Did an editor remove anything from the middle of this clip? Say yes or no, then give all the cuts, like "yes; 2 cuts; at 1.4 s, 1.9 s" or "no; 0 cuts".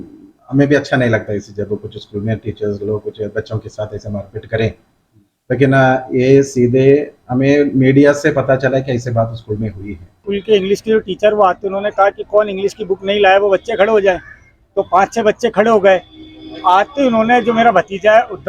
yes; 1 cut; at 10.2 s